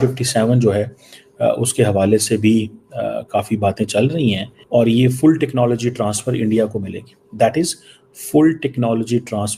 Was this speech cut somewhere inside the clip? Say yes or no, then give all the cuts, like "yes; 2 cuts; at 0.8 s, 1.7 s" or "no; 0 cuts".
yes; 1 cut; at 4.6 s